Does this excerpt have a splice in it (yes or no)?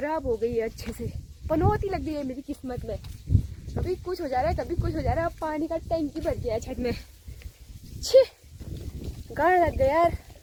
no